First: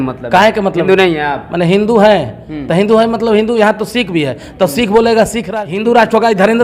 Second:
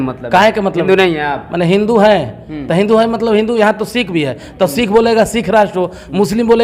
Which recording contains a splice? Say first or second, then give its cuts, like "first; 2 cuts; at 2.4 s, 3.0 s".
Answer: first; 1 cut; at 5.4 s